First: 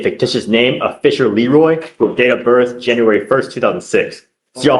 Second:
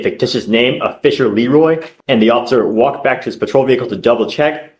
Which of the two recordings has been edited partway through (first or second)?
second